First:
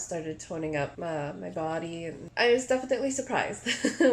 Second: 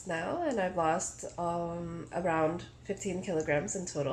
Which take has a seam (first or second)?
first